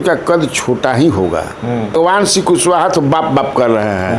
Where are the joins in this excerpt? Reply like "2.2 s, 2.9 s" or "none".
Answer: 1.9 s

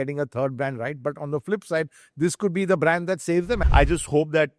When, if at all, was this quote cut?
3.6 s

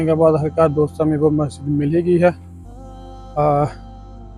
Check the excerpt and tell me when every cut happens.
none

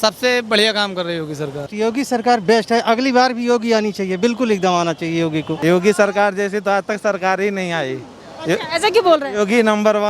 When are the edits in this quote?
1.7 s, 5.5 s

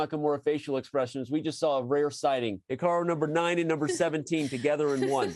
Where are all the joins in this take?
2.6 s

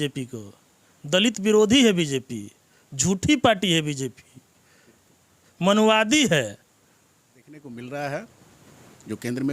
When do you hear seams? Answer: 7.6 s

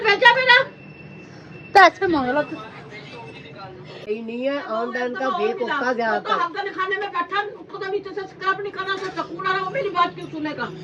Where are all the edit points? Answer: 4.0 s

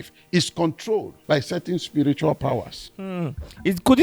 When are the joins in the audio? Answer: 1.1 s

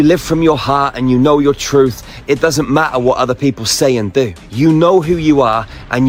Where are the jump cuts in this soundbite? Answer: none

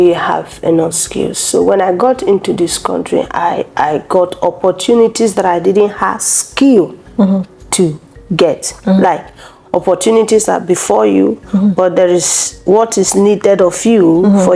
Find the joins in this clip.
none

